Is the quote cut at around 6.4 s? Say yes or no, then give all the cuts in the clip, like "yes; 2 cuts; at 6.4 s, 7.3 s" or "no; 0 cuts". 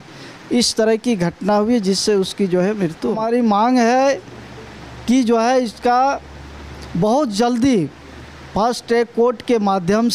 no; 1 cut; at 3.2 s